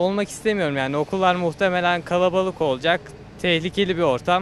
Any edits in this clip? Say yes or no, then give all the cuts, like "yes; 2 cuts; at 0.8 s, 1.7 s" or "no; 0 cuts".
no; 0 cuts